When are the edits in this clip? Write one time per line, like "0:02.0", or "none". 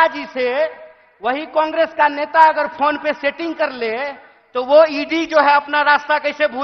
none